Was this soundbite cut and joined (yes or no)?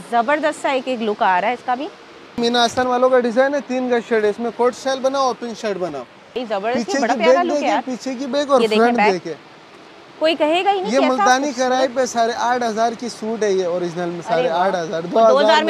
yes